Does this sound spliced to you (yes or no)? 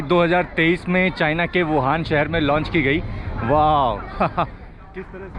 no